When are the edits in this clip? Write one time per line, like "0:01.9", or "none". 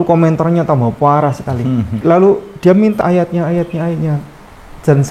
0:02.0
0:03.0